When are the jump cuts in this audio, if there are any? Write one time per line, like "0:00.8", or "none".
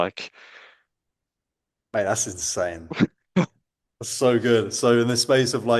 none

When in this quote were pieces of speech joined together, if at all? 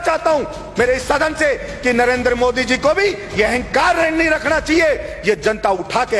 none

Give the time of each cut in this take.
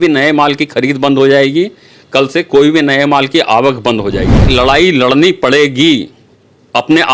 0:04.5

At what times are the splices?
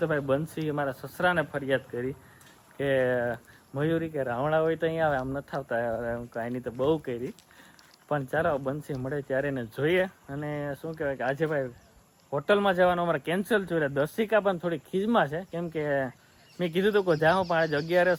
none

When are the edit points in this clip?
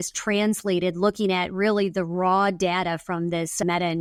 none

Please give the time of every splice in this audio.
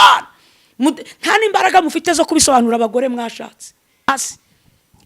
0:04.1

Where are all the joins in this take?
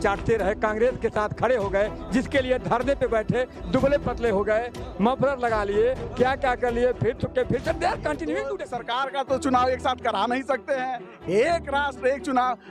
0:08.6

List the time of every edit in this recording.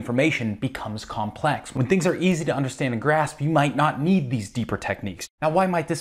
0:05.1

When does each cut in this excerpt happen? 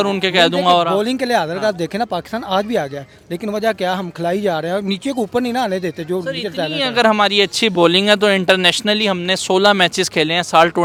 none

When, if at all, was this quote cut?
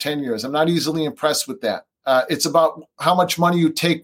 0:01.9

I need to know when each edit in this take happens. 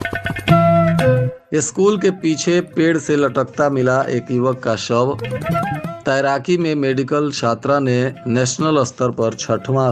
0:01.4

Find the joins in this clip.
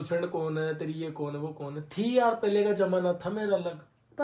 none

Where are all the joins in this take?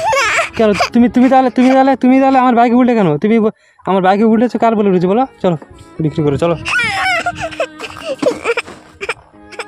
none

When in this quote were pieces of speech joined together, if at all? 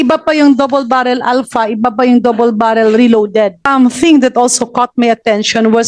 0:03.7

